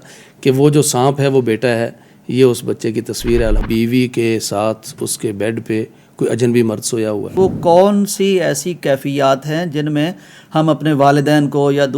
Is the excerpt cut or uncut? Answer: cut